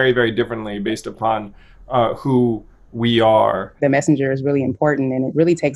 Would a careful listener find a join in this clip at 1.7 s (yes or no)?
no